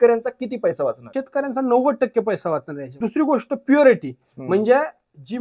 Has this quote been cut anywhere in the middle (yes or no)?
yes